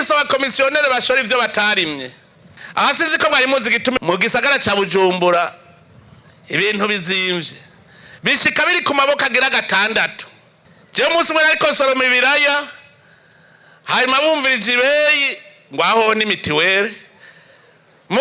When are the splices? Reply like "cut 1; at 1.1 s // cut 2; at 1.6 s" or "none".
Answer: cut 1; at 4.0 s